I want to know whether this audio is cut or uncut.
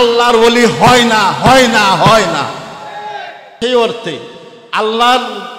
cut